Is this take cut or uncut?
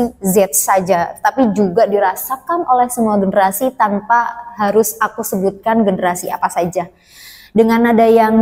uncut